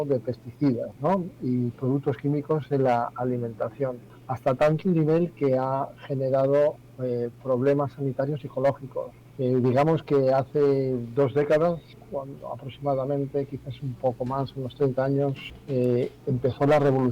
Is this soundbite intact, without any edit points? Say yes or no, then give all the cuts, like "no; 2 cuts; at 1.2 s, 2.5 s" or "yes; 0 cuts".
no; 4 cuts; at 4.1 s, 9.2 s, 12.0 s, 15.5 s